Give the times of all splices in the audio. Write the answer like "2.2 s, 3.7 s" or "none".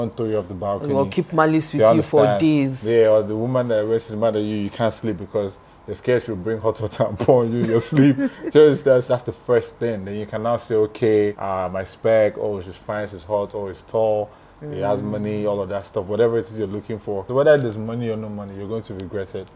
9.0 s, 11.4 s, 17.2 s